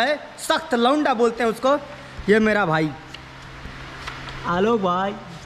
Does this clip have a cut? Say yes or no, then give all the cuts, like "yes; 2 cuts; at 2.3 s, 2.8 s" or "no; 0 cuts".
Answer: no; 0 cuts